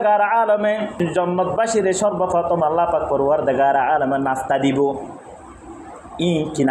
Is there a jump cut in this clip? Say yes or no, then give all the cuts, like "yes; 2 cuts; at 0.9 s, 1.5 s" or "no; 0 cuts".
yes; 1 cut; at 1.0 s